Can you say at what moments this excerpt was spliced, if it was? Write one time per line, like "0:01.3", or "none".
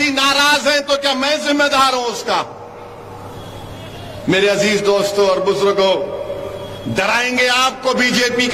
none